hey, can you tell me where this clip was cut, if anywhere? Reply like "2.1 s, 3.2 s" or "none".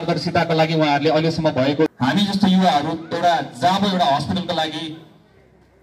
1.9 s